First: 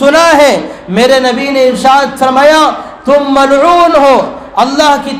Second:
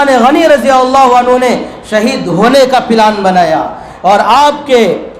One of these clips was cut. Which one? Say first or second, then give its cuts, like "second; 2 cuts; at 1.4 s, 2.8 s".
second; 1 cut; at 3.8 s